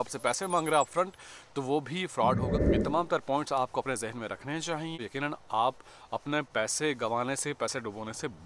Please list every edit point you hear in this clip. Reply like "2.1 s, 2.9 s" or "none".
2.6 s, 5.0 s